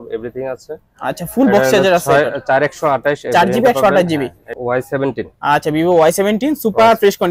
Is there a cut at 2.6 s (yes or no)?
no